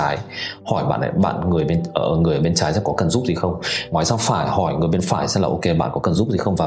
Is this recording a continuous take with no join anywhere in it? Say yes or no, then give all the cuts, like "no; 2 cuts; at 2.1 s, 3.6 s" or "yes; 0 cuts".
yes; 0 cuts